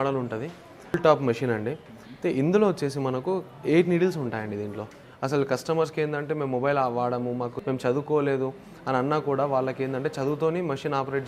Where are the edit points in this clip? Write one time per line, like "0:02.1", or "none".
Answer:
0:00.9
0:05.1
0:07.5